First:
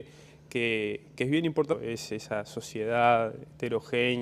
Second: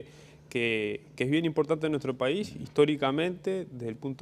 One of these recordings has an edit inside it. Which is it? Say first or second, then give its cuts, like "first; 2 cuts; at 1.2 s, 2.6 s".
second; 1 cut; at 1.8 s